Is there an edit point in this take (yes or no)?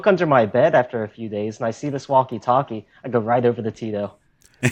no